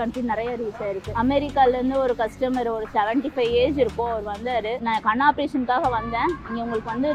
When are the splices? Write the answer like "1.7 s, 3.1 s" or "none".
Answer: 1.1 s, 4.8 s